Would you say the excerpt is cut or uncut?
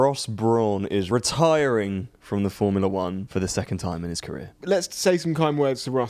cut